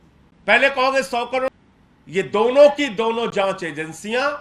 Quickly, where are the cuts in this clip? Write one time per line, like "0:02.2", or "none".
0:01.5